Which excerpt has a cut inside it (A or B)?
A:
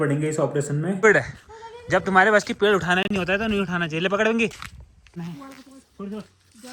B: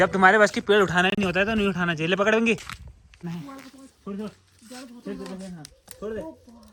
A